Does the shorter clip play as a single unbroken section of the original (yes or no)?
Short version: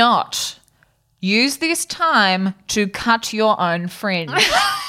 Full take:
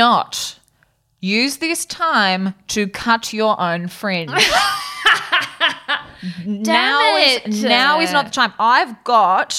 yes